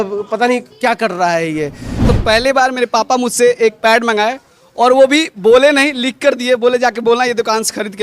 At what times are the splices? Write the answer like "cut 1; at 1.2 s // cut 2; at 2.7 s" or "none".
cut 1; at 2.1 s